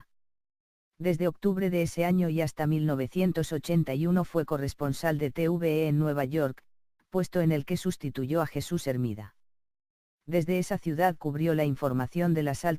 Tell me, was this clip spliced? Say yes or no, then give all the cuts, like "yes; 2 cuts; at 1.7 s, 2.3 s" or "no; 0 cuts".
yes; 1 cut; at 4.0 s